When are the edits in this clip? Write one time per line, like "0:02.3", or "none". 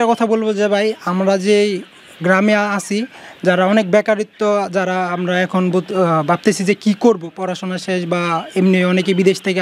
none